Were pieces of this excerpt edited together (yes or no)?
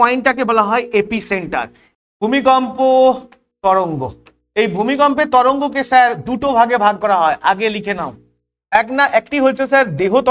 yes